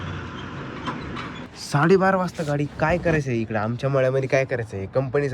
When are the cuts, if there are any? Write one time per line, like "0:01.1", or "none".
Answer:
0:01.5